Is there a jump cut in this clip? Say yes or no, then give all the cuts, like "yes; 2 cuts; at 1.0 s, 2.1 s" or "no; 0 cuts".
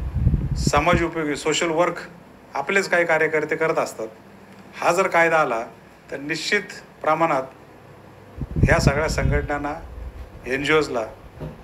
no; 0 cuts